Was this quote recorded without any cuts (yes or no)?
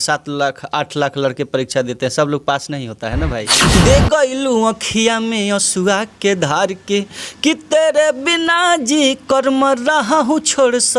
no